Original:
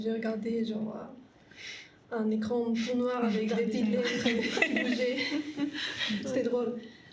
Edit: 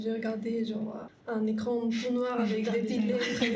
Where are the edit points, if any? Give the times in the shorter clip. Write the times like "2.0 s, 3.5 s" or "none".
1.1 s